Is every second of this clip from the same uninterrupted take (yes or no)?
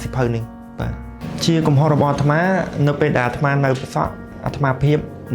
no